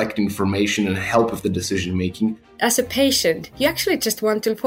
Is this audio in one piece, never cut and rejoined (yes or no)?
no